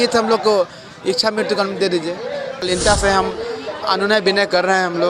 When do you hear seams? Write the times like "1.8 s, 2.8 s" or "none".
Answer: 2.6 s